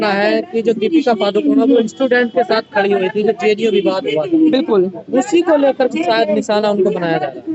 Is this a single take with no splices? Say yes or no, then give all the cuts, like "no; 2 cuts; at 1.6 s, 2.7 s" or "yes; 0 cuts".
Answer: yes; 0 cuts